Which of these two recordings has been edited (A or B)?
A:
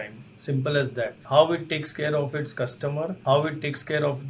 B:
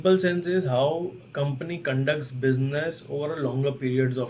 A